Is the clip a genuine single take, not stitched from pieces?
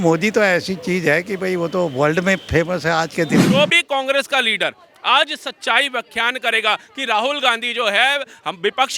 no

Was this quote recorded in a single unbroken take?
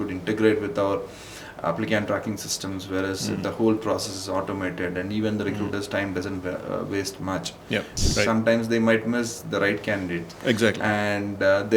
no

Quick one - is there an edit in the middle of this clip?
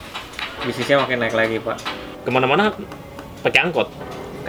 no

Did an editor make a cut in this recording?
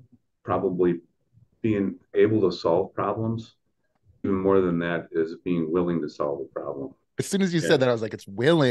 yes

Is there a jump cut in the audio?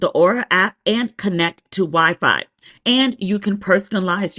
yes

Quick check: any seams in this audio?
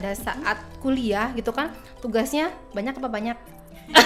no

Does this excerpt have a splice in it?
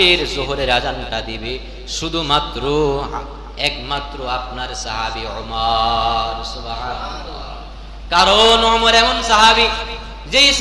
no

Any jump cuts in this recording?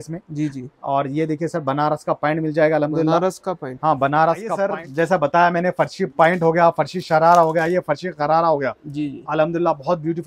yes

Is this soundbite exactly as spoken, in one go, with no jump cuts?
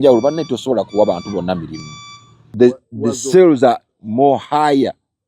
no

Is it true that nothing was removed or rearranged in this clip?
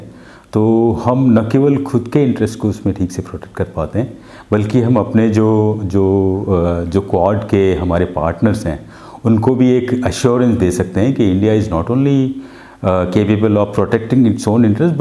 yes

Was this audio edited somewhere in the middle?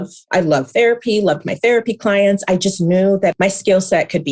yes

